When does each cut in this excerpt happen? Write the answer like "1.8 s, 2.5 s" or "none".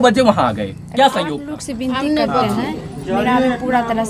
1.4 s